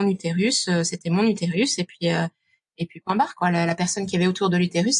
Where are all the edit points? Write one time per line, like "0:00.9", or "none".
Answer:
none